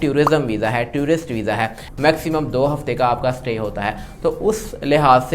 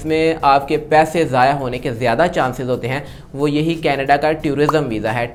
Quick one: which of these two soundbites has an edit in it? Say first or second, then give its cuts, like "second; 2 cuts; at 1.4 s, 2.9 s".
first; 1 cut; at 1.8 s